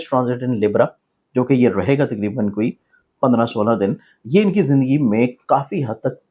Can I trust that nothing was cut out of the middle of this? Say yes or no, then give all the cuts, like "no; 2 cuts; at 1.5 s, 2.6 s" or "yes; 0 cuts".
yes; 0 cuts